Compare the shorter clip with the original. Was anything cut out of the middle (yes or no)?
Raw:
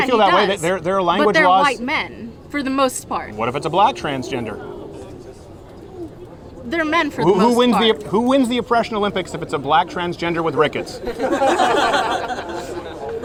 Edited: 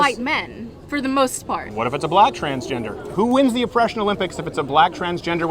yes